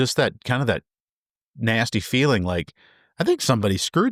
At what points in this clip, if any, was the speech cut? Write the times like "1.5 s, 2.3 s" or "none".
none